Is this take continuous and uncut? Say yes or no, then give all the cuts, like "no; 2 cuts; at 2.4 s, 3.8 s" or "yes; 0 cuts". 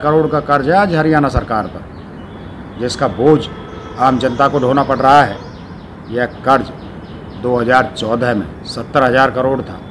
yes; 0 cuts